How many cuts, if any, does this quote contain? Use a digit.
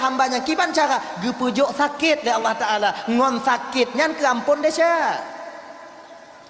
0